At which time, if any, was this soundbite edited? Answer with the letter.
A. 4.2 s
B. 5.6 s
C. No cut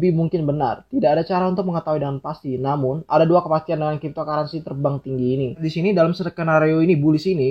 B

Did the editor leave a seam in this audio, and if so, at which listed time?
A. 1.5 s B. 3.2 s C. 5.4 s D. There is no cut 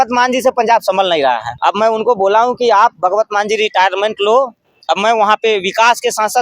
A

